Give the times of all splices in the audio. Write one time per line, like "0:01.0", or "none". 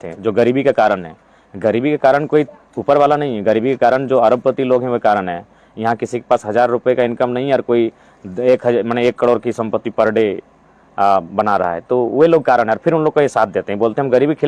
none